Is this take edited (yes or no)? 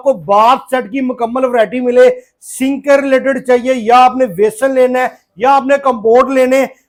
no